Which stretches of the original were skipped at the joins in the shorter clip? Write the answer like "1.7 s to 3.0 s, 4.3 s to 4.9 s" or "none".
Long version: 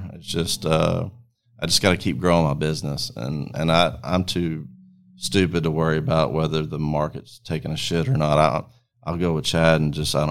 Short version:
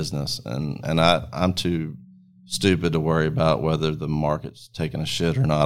none